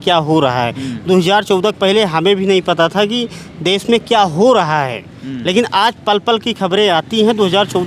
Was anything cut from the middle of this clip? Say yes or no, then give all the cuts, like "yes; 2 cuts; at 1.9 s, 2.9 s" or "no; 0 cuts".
no; 0 cuts